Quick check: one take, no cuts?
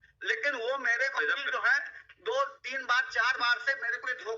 yes; 0 cuts

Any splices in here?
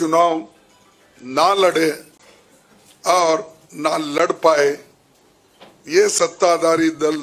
no; 0 cuts

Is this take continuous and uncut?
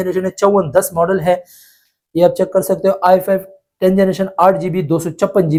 yes; 0 cuts

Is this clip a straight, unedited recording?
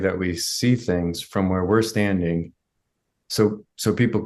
yes; 0 cuts

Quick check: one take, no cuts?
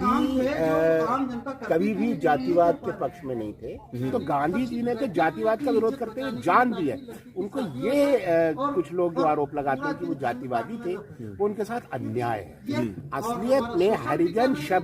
no; 2 cuts; at 4.1 s, 12.8 s

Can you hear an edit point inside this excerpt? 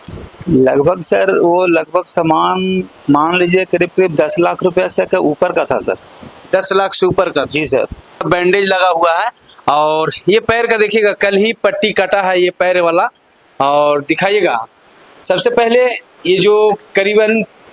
yes; 1 cut; at 8.2 s

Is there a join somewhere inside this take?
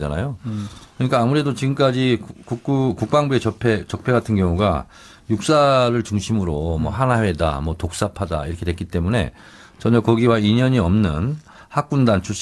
no; 0 cuts

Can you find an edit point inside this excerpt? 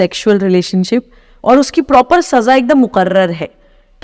no; 0 cuts

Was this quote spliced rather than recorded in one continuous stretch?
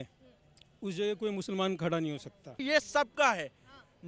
yes; 1 cut; at 2.6 s

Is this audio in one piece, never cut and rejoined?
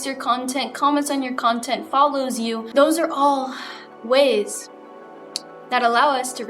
no; 1 cut; at 2.6 s

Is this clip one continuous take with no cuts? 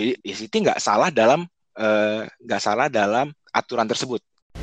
no; 1 cut; at 3.4 s

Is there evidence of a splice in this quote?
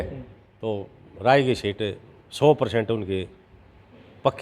no; 0 cuts

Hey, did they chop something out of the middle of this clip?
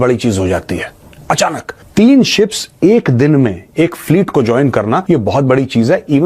yes; 2 cuts; at 1.7 s, 5.0 s

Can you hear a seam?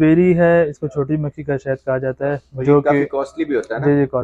no; 0 cuts

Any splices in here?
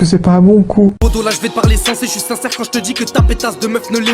yes; 1 cut; at 1.0 s

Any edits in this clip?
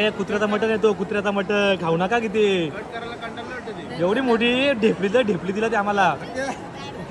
no; 0 cuts

